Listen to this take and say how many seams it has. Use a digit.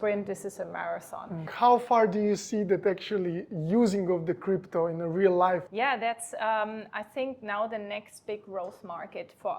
2